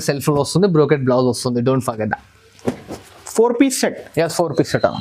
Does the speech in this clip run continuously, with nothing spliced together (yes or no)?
yes